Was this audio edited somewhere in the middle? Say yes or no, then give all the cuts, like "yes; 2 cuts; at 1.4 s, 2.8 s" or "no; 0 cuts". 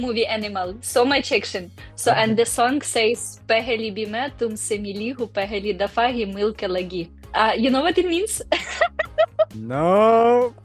no; 0 cuts